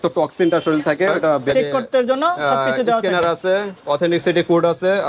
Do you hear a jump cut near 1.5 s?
yes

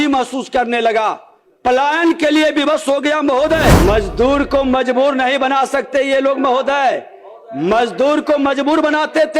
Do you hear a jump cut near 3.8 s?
yes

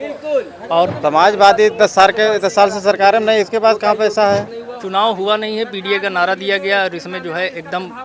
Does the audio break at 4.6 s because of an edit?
yes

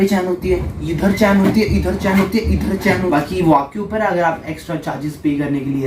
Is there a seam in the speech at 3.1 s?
yes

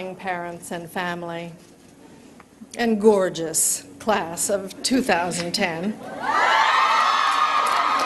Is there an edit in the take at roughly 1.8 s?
yes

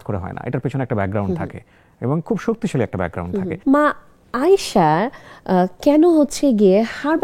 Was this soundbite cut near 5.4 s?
no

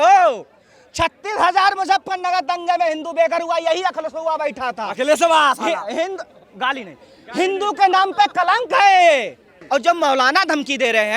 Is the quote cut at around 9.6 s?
yes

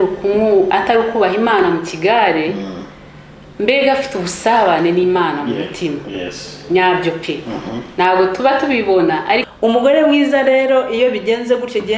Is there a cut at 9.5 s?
yes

